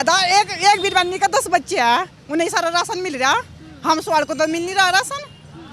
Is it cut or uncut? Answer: uncut